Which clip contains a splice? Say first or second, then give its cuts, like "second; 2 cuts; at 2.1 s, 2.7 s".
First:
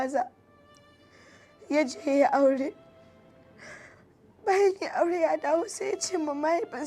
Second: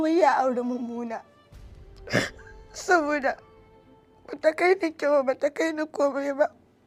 first; 1 cut; at 3.1 s